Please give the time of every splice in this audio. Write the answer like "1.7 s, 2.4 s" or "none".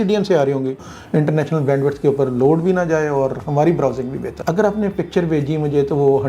0.9 s, 4.3 s